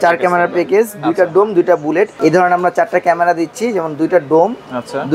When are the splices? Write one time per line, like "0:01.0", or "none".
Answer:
0:02.1